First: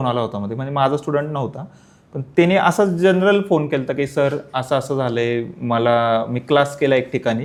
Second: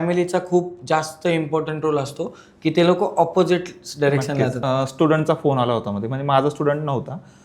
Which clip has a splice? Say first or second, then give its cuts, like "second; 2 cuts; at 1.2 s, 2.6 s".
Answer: second; 1 cut; at 4.6 s